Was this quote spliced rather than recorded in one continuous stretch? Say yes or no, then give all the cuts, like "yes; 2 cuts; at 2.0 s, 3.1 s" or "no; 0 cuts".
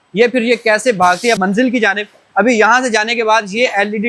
yes; 1 cut; at 1.4 s